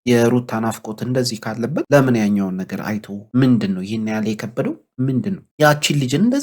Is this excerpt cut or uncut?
uncut